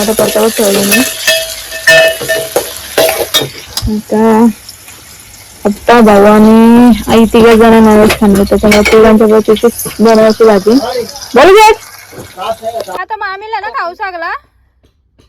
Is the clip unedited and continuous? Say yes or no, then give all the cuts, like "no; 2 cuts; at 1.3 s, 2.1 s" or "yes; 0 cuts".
no; 1 cut; at 13.0 s